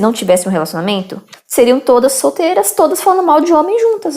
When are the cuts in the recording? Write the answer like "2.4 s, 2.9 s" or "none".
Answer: 1.2 s